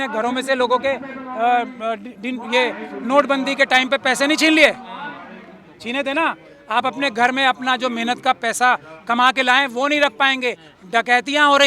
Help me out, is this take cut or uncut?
uncut